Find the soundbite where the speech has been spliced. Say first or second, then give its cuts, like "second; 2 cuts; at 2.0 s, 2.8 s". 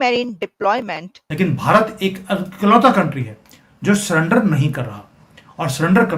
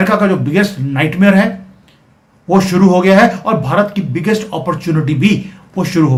first; 1 cut; at 1.3 s